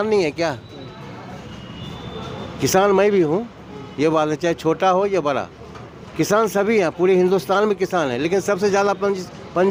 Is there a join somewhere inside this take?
no; 0 cuts

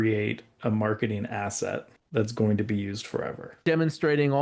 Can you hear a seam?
yes; 2 cuts; at 2.0 s, 3.6 s

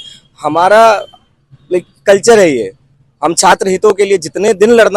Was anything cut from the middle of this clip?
no; 0 cuts

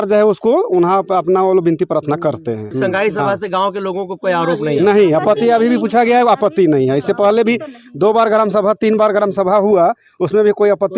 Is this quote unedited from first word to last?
yes; 0 cuts

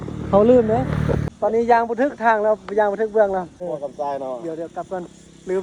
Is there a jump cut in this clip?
yes; 2 cuts; at 1.3 s, 3.6 s

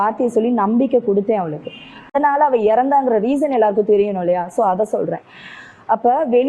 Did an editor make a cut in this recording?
yes; 1 cut; at 2.1 s

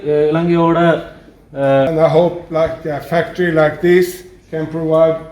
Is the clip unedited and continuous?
no; 1 cut; at 1.9 s

